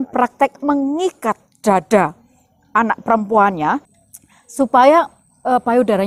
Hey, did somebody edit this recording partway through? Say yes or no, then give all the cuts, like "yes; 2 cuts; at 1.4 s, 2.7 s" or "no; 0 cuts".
yes; 1 cut; at 4.0 s